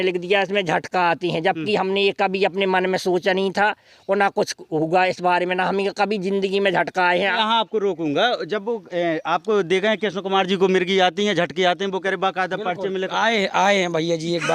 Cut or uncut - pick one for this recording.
cut